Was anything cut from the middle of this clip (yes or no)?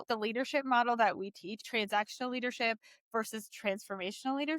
yes